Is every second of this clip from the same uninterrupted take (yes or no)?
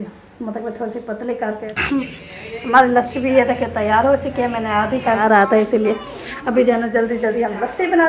no